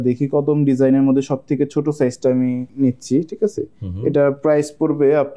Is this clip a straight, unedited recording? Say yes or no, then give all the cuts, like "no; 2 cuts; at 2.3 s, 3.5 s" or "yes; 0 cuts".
yes; 0 cuts